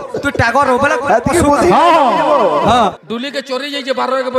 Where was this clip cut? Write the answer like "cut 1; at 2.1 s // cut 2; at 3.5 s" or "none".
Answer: cut 1; at 3.0 s